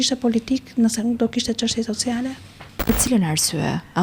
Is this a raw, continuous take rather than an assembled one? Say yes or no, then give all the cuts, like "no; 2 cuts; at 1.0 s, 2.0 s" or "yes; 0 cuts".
no; 1 cut; at 2.9 s